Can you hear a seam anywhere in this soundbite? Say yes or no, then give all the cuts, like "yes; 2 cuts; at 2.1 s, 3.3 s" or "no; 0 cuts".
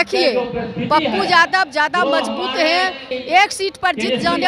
yes; 1 cut; at 3.1 s